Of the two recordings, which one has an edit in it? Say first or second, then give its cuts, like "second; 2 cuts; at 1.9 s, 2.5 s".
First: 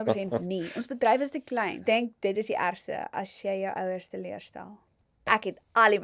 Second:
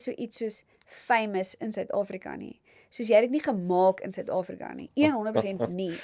first; 2 cuts; at 1.8 s, 5.3 s